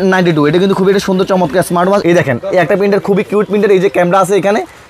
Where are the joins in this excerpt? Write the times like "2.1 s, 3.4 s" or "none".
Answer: 2.0 s